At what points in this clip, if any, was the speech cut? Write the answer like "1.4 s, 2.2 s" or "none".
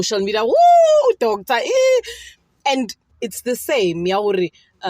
3.2 s